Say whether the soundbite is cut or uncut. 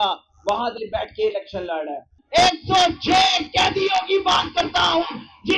cut